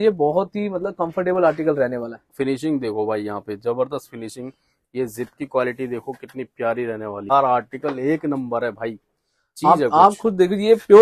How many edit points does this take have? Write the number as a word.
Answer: two